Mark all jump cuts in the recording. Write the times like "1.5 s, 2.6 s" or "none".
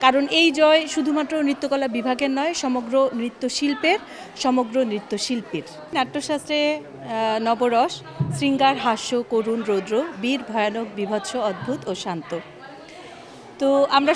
none